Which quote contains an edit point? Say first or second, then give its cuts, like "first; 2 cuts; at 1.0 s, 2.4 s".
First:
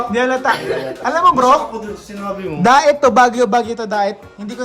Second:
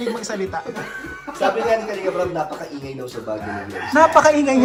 first; 1 cut; at 0.9 s